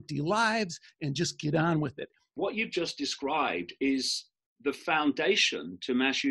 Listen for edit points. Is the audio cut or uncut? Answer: cut